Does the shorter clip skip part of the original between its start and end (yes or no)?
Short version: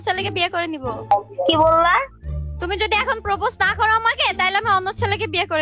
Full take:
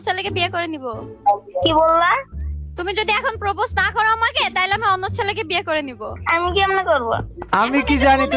yes